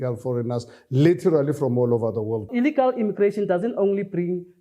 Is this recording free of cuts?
no; 1 cut; at 2.5 s

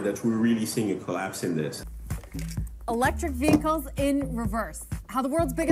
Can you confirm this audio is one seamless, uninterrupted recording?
no; 1 cut; at 1.8 s

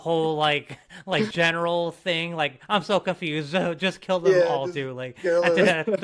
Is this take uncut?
yes; 0 cuts

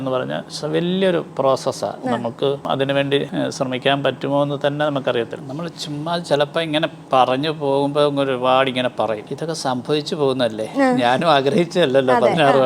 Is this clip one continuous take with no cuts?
no; 3 cuts; at 3.0 s, 5.4 s, 9.2 s

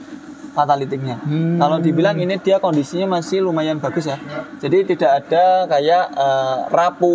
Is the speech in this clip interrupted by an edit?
no; 0 cuts

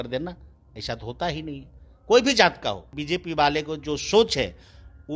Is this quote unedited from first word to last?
no; 1 cut; at 2.9 s

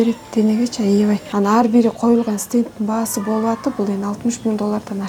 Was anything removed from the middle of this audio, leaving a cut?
yes; 1 cut; at 1.3 s

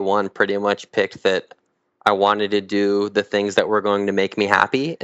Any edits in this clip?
no; 0 cuts

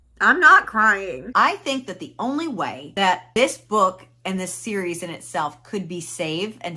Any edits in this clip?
yes; 1 cut; at 1.2 s

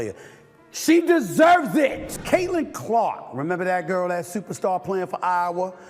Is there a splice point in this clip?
yes; 1 cut; at 2.1 s

